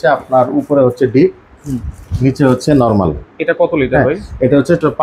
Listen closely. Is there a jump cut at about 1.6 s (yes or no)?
no